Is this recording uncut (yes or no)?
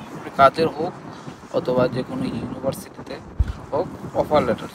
yes